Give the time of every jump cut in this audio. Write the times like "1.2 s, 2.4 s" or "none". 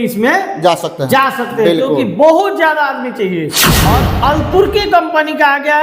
3.7 s